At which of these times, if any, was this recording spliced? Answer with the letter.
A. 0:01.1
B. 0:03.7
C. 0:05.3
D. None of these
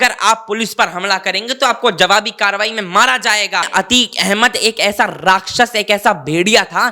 B